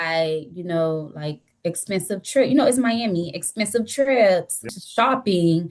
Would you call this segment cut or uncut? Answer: cut